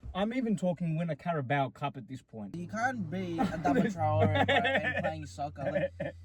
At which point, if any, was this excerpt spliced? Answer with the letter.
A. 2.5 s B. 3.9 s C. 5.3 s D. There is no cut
A